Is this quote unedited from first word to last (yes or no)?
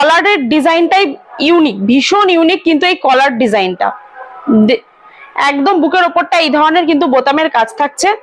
yes